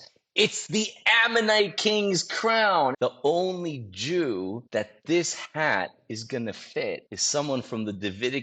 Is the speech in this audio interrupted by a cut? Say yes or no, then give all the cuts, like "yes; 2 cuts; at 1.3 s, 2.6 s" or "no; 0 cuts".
yes; 3 cuts; at 2.9 s, 4.6 s, 7.1 s